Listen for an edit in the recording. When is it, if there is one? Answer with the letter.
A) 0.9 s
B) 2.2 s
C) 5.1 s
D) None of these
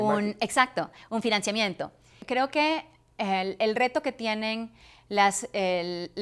B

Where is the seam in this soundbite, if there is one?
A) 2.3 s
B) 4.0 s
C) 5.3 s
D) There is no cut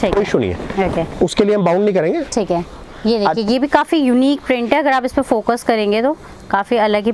D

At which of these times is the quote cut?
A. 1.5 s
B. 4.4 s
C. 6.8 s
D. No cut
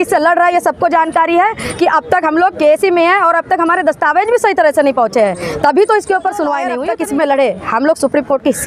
C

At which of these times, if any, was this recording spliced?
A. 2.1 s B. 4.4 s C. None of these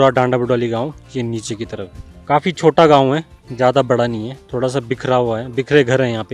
A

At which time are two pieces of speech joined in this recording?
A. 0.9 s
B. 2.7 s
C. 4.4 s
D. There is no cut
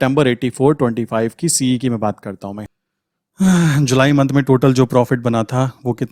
B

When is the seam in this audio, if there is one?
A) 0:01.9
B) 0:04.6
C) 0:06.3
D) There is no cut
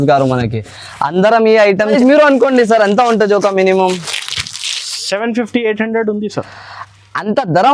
A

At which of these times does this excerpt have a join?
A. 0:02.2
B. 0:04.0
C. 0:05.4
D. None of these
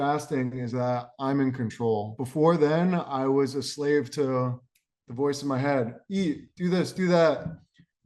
A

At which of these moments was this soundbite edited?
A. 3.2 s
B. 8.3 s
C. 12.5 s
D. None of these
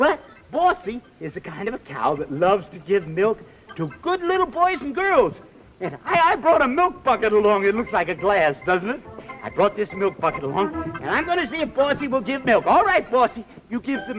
B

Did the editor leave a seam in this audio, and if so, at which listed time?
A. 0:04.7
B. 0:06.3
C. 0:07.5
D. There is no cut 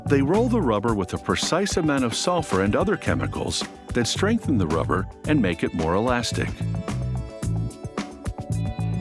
A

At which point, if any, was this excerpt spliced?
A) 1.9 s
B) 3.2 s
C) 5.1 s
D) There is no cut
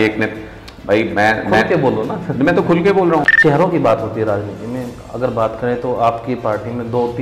B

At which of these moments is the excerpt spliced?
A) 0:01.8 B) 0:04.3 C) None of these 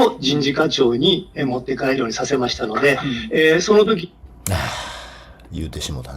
B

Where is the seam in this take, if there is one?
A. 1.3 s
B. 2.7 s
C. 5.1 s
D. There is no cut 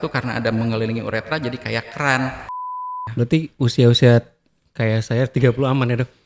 B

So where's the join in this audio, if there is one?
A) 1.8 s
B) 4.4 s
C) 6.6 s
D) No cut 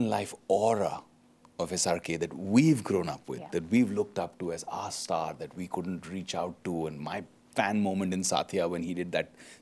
D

